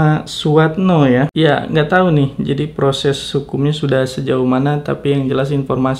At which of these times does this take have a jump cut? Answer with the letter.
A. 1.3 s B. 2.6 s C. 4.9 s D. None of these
A